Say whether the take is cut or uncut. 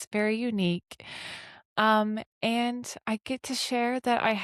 uncut